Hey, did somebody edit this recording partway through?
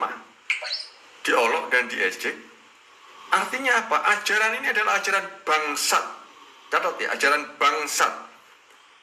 no; 0 cuts

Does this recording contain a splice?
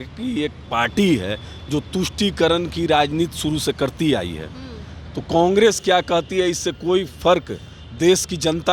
no; 0 cuts

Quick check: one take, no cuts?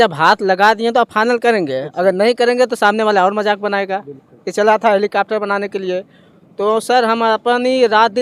yes; 0 cuts

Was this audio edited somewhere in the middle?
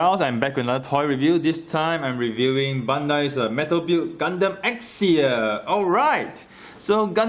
no; 0 cuts

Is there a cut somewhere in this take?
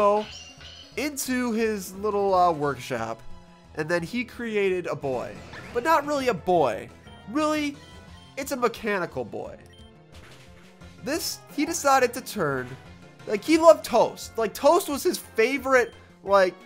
no; 0 cuts

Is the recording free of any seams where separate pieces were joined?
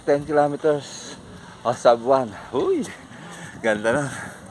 yes; 0 cuts

